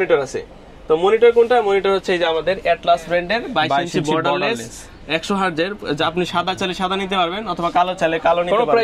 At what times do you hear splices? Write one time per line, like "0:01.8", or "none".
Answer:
none